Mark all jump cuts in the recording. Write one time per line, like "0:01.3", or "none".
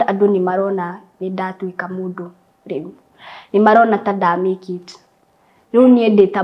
none